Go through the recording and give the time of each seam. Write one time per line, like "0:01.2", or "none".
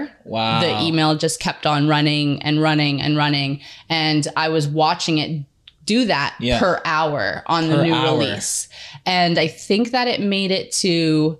none